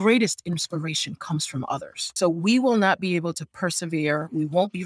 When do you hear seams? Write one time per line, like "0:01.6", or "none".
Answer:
0:02.2